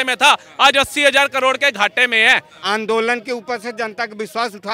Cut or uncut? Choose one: cut